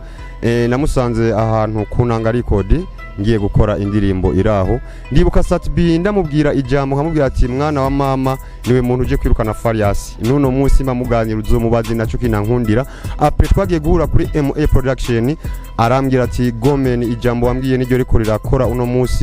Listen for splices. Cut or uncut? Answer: uncut